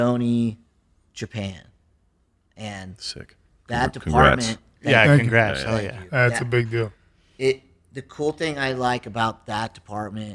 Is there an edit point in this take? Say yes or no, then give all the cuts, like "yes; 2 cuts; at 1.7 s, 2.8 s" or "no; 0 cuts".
no; 0 cuts